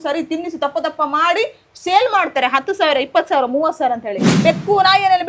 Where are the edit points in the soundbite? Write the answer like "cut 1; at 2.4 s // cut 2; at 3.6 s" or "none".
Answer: cut 1; at 4.3 s